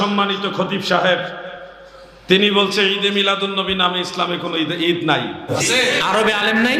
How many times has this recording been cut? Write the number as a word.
one